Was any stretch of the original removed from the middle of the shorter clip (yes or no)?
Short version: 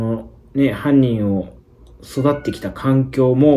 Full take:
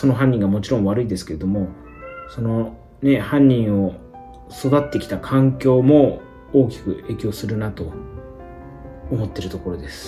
no